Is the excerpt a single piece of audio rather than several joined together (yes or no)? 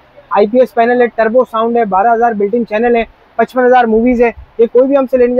yes